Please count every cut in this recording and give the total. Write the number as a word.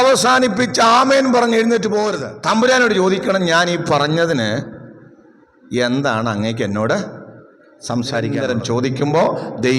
two